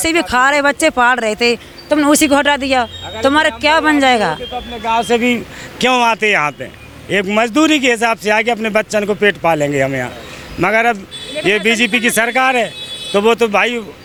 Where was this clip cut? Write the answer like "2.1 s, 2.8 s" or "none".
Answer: none